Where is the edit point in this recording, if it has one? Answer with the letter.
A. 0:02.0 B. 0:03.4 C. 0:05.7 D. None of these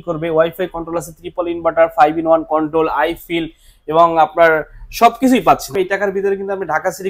C